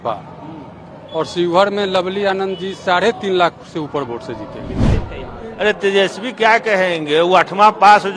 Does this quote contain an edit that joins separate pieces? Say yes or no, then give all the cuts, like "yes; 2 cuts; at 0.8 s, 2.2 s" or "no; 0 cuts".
yes; 1 cut; at 4.9 s